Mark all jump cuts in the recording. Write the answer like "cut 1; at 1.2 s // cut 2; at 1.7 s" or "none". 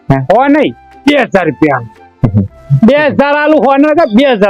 none